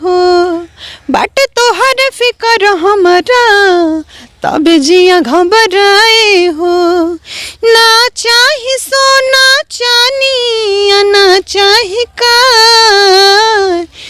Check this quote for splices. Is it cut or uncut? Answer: uncut